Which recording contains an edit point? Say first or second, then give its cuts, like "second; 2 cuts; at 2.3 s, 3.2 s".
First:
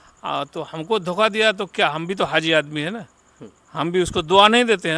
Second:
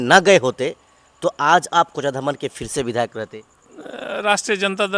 second; 1 cut; at 3.6 s